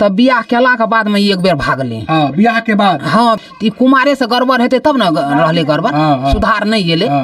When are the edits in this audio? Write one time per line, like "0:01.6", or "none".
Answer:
0:03.4